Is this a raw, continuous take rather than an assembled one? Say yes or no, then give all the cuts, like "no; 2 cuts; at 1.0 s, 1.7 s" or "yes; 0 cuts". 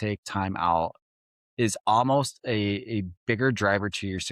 yes; 0 cuts